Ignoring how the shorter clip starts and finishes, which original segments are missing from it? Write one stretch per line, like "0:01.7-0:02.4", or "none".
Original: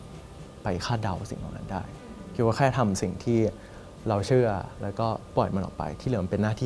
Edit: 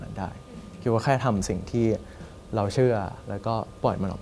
none